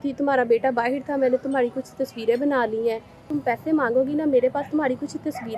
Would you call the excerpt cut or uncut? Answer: cut